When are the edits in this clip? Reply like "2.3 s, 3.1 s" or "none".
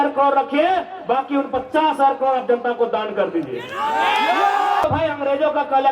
4.8 s